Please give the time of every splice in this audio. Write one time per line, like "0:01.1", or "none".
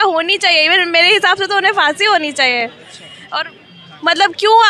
none

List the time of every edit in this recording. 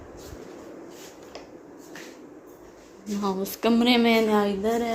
none

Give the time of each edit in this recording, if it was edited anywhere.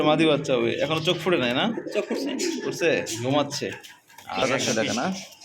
0:04.4

